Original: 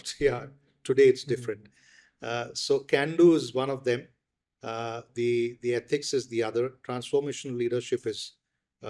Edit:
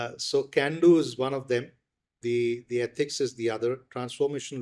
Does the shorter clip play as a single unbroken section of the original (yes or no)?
no